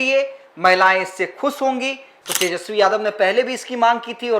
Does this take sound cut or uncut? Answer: cut